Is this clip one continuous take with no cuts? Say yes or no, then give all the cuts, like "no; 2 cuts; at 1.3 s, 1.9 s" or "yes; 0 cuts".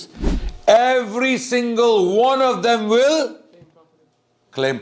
yes; 0 cuts